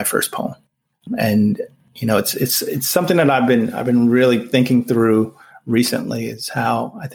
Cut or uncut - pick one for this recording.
cut